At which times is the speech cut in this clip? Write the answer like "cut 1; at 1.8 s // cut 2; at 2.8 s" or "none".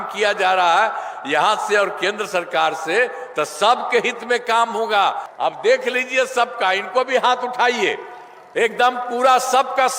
cut 1; at 5.3 s